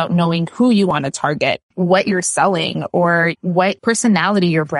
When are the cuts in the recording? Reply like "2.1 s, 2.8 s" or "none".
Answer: 3.4 s